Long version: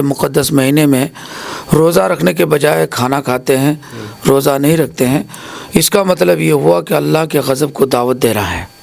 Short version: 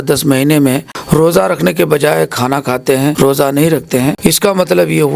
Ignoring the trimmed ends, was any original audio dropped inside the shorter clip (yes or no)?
yes